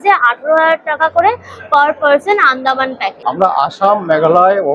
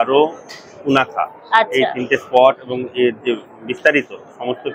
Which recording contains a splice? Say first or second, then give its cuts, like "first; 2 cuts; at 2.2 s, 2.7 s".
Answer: first; 1 cut; at 3.3 s